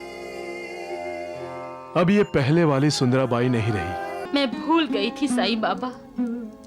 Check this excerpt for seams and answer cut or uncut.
cut